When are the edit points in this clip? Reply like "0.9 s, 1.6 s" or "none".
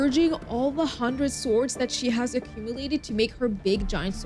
none